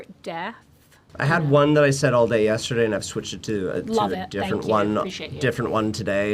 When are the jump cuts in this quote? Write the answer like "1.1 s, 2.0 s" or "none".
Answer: 1.0 s